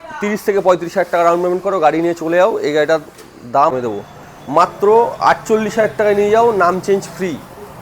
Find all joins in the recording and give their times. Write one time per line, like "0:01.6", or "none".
0:03.8